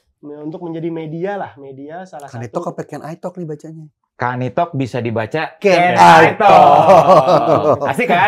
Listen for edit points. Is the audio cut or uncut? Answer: uncut